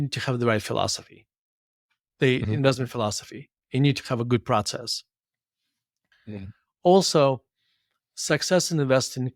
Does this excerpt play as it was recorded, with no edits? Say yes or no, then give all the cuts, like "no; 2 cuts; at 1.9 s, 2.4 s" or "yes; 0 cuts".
yes; 0 cuts